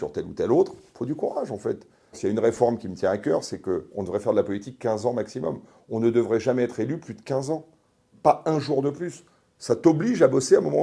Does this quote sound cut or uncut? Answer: cut